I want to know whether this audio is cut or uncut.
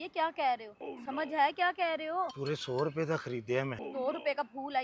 cut